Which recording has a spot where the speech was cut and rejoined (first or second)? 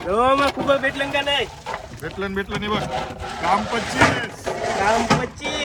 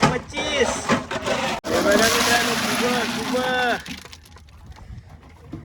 second